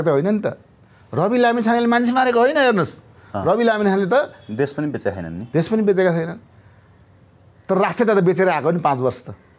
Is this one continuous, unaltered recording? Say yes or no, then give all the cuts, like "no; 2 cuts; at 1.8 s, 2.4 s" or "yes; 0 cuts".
yes; 0 cuts